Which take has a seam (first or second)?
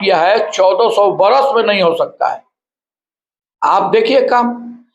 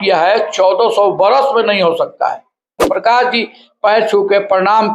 second